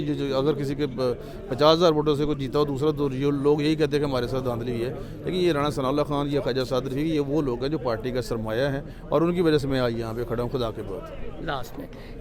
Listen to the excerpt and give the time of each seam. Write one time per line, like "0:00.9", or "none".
none